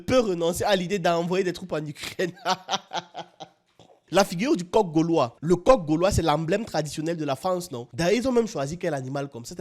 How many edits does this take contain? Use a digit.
1